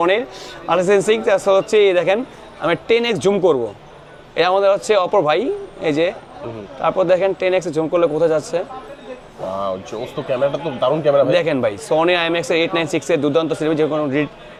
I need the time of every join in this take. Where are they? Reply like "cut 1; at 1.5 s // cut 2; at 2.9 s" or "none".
none